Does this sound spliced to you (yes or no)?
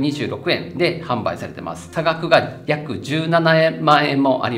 yes